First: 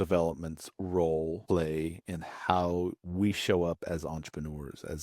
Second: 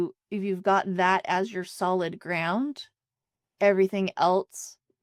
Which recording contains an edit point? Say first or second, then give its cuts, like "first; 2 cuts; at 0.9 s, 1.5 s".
first; 2 cuts; at 1.4 s, 3.0 s